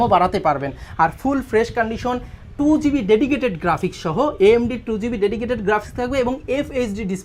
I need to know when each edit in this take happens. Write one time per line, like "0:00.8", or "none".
none